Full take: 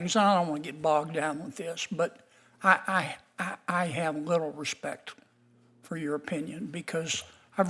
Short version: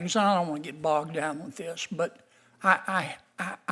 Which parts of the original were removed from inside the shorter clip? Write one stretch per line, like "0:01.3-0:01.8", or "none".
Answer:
none